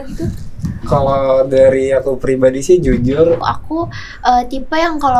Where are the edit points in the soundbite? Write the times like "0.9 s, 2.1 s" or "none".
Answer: 3.4 s